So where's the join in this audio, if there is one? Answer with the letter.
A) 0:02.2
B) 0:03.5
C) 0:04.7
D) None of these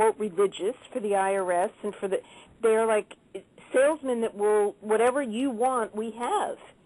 A